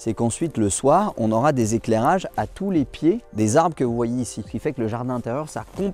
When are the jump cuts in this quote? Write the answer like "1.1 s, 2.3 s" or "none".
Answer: none